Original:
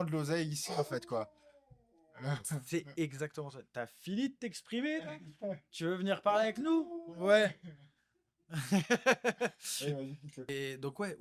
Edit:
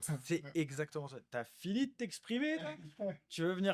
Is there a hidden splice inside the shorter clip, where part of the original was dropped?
no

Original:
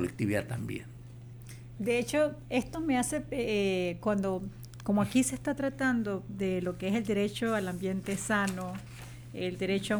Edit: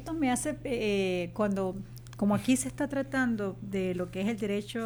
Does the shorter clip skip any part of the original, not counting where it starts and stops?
no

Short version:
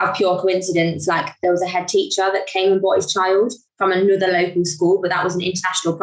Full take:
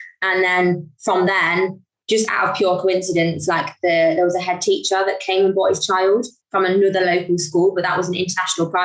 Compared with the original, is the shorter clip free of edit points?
no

